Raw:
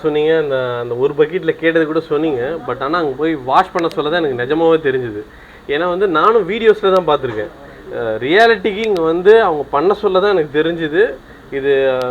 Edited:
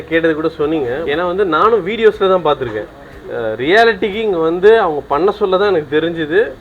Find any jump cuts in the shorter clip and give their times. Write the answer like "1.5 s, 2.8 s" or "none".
1.0 s